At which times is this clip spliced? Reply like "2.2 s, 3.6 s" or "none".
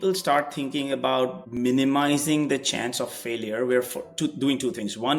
1.4 s

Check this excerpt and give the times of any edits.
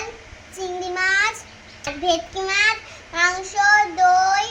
1.9 s

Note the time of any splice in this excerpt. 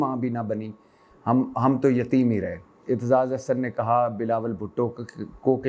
2.7 s

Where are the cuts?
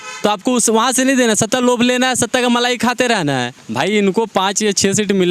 3.6 s

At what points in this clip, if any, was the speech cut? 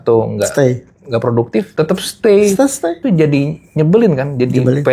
1.7 s, 3.0 s

